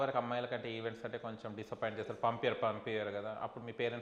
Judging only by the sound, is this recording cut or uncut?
uncut